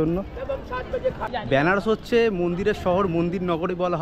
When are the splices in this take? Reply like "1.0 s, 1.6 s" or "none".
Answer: 1.2 s